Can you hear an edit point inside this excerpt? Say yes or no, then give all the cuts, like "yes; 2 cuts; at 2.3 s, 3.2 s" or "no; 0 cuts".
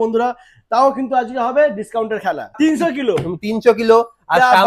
yes; 1 cut; at 2.5 s